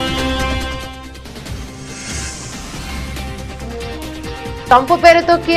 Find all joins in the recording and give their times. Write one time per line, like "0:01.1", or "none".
0:02.6
0:03.4